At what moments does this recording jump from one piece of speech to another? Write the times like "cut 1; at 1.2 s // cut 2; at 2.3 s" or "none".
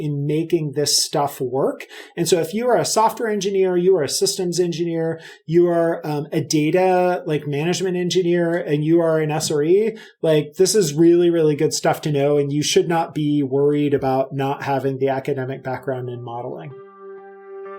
cut 1; at 16.7 s

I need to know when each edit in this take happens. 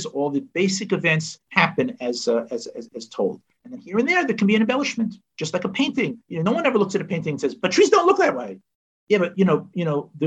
none

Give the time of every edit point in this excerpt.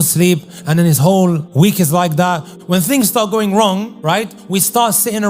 cut 1; at 1.5 s // cut 2; at 2.5 s // cut 3; at 4.3 s

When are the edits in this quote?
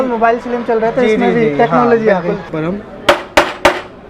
cut 1; at 2.4 s

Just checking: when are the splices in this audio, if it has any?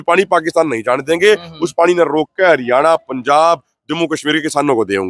none

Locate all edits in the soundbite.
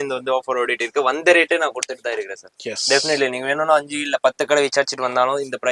none

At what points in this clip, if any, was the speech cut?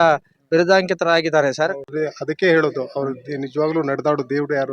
cut 1; at 1.9 s

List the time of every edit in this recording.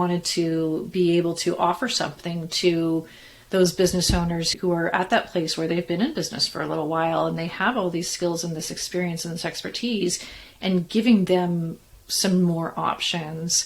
none

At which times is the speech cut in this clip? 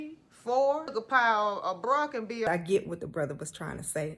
cut 1; at 0.9 s // cut 2; at 2.5 s

